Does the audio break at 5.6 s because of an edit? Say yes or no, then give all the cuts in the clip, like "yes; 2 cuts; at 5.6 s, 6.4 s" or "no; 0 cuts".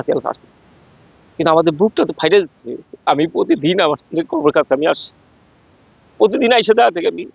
no; 0 cuts